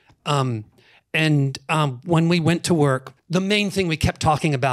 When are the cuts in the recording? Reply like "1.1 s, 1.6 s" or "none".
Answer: 3.1 s